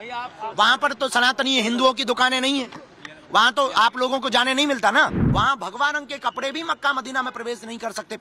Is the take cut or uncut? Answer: cut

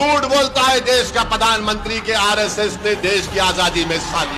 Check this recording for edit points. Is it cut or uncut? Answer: uncut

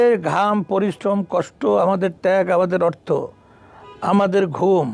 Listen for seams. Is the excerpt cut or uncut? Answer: uncut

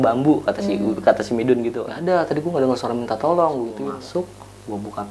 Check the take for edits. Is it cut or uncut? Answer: cut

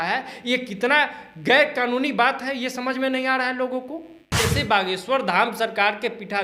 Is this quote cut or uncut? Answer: cut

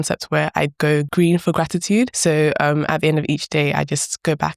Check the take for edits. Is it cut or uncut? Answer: cut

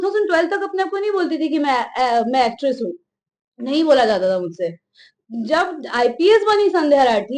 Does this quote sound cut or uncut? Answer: uncut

